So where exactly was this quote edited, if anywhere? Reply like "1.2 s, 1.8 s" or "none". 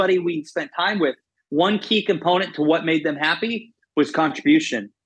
1.0 s